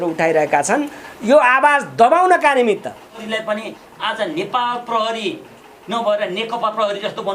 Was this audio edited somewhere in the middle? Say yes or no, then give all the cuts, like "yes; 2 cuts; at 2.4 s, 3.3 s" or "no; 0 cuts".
yes; 1 cut; at 3.2 s